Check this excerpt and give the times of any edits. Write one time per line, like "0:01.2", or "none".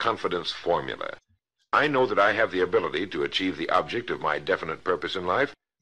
0:01.7